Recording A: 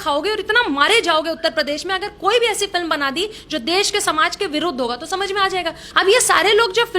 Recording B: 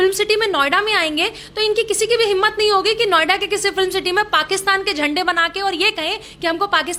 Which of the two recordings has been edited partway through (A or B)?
A